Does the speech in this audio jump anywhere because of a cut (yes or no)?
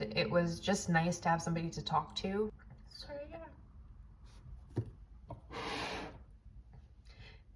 yes